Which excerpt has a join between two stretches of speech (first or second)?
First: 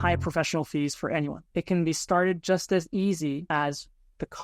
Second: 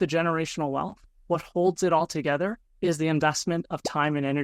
first